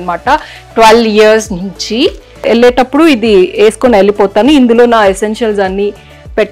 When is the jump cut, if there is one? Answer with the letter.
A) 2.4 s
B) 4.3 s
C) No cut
A